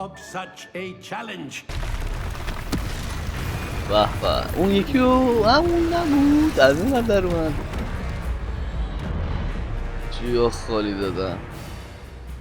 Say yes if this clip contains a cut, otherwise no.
yes